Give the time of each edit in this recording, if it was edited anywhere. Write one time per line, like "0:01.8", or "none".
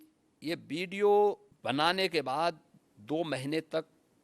0:01.5